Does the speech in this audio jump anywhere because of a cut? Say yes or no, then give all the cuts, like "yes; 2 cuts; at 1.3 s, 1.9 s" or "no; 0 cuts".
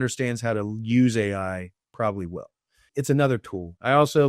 yes; 1 cut; at 2.8 s